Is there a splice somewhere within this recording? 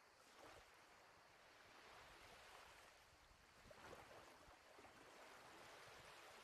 no; 0 cuts

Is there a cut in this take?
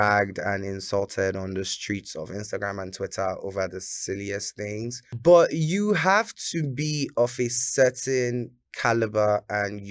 yes; 1 cut; at 5.1 s

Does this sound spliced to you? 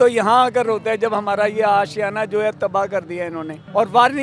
no; 0 cuts

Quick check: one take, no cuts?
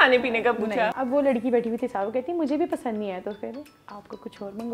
no; 1 cut; at 0.9 s

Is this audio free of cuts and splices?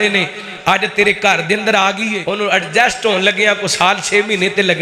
no; 1 cut; at 2.2 s

